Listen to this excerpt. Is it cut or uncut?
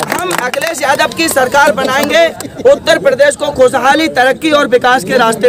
uncut